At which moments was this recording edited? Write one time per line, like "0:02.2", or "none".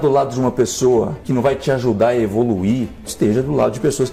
none